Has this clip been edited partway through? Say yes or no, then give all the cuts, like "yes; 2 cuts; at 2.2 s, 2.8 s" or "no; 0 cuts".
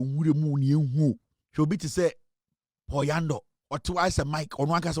yes; 2 cuts; at 1.3 s, 3.5 s